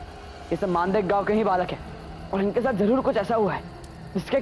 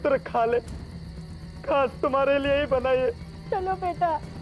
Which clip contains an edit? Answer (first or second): second